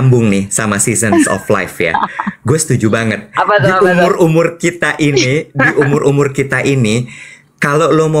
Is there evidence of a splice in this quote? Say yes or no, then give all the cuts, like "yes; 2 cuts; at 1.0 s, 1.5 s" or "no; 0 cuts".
no; 0 cuts